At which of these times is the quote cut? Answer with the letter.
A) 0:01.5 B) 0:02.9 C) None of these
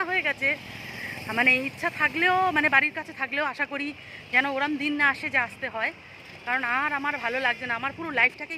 C